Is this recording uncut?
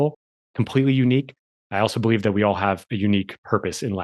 yes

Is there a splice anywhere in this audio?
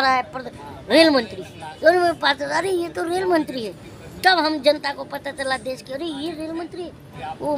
no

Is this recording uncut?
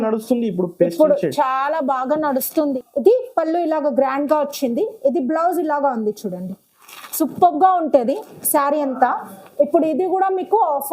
no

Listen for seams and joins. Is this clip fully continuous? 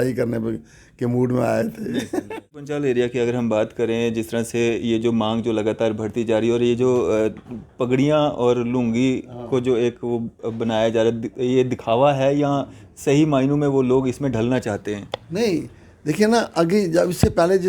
no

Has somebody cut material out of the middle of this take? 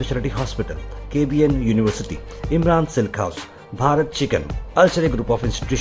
no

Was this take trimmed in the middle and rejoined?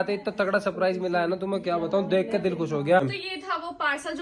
yes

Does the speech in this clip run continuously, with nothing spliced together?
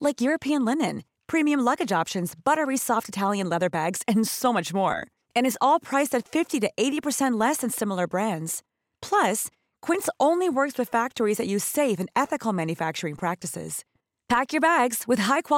yes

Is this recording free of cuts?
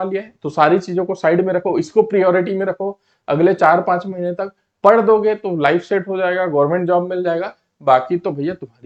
yes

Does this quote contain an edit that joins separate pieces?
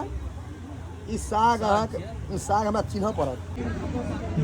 yes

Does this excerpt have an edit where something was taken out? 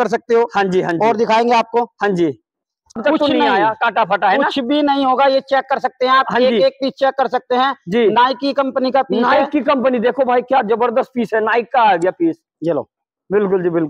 yes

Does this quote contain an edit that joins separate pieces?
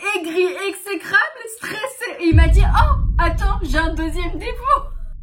no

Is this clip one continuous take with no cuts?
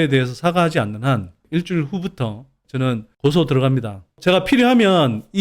no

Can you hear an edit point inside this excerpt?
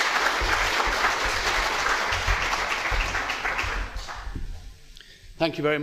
no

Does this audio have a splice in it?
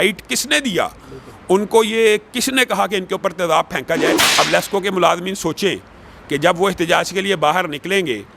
yes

